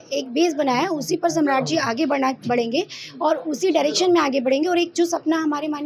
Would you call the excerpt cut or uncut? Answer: uncut